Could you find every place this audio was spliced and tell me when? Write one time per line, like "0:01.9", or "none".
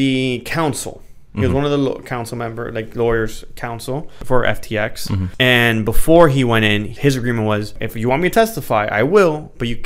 0:04.1
0:05.3
0:06.9
0:07.8